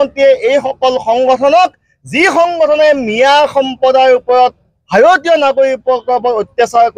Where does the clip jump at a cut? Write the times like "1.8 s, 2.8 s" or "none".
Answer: none